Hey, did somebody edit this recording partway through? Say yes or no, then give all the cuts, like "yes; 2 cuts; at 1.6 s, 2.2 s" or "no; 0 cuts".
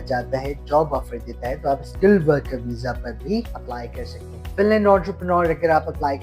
yes; 1 cut; at 4.0 s